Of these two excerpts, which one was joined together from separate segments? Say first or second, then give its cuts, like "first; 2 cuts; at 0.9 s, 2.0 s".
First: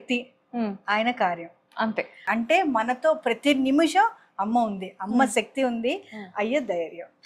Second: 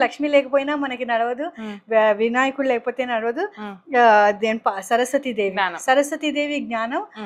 first; 1 cut; at 2.3 s